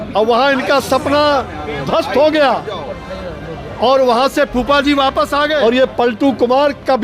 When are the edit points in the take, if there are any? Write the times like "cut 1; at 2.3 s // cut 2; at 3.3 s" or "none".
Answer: cut 1; at 5.6 s